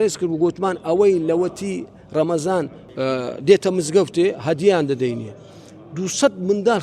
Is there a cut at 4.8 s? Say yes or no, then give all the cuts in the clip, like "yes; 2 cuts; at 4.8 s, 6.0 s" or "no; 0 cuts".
no; 1 cut; at 2.8 s